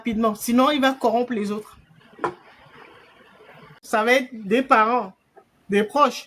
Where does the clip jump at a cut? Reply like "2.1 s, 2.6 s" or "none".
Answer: 3.8 s